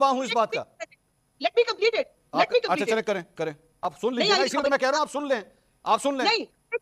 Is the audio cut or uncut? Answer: cut